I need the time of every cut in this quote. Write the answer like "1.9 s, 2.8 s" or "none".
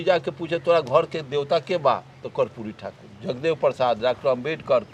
none